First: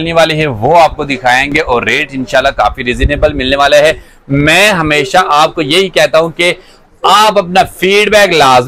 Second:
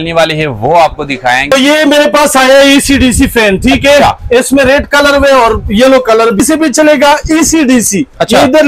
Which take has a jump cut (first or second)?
second